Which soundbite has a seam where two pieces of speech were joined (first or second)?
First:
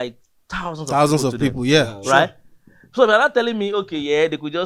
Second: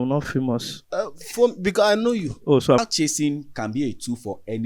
second